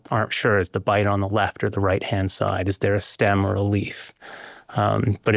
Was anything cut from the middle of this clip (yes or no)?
no